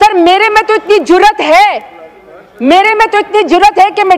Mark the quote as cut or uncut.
uncut